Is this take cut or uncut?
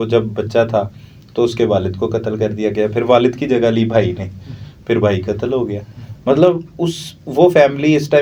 uncut